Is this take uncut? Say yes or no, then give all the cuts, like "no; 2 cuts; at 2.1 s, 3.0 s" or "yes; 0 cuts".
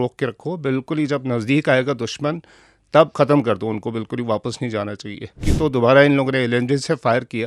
no; 2 cuts; at 3.1 s, 5.4 s